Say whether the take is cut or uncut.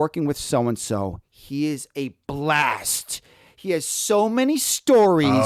uncut